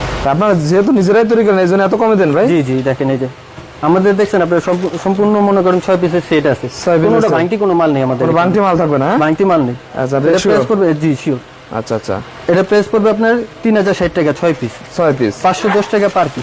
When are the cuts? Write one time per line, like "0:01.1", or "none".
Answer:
none